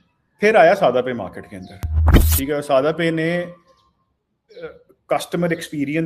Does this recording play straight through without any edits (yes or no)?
yes